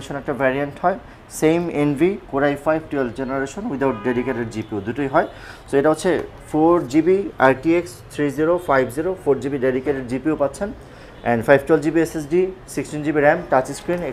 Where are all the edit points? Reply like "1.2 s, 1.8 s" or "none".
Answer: none